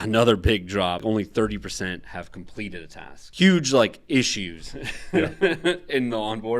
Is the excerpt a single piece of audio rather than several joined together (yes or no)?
no